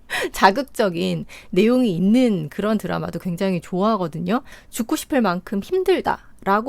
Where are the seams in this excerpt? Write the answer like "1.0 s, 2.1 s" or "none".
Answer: 4.5 s

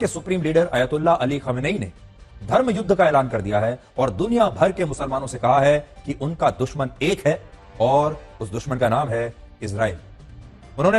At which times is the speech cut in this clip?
none

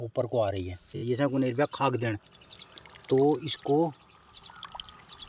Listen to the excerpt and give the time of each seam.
1.0 s

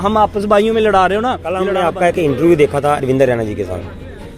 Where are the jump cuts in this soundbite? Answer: 1.7 s

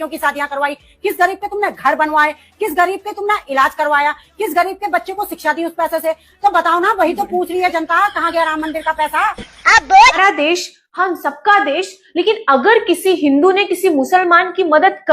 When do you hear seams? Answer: 10.2 s

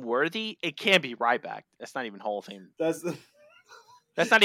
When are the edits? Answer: none

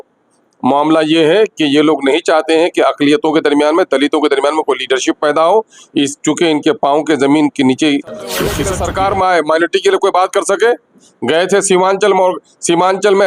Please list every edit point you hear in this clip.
8.7 s

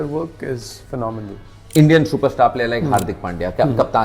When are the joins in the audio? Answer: 1.6 s

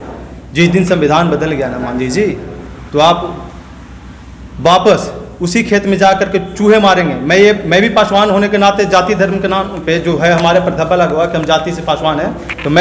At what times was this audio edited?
none

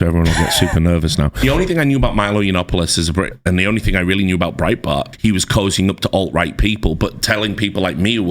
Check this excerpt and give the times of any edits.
1.4 s, 3.3 s, 5.1 s

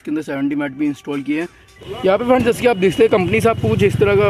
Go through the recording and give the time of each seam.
2.2 s

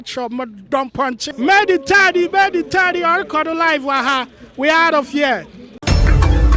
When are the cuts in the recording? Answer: 1.2 s, 5.8 s

